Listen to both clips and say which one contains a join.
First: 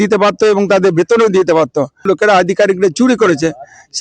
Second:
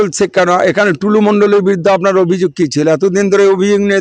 first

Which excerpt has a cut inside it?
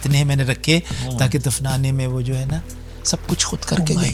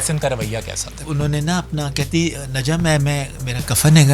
second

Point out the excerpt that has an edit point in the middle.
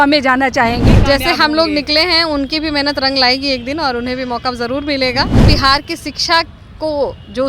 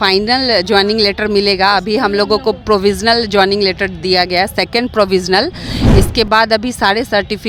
first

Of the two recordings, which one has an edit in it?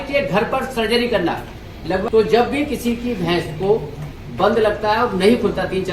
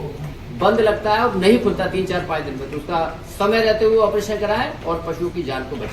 first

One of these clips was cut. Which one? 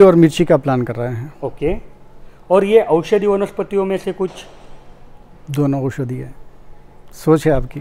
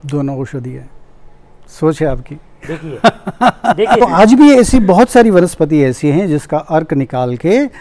second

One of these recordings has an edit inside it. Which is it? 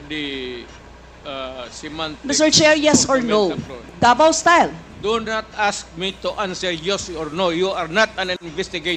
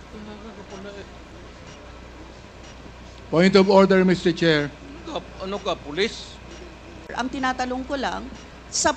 second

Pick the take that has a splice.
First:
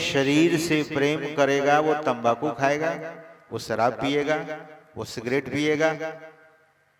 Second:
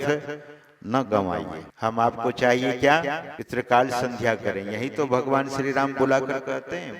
second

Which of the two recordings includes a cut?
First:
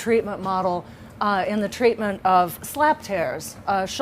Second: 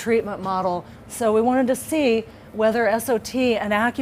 first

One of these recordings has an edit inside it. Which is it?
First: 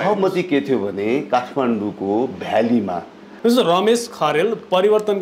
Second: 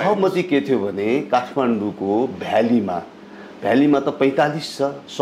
first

